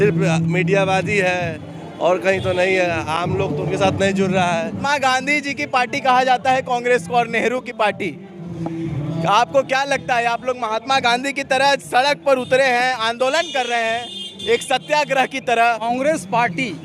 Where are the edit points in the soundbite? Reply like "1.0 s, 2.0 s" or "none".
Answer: 4.8 s, 15.9 s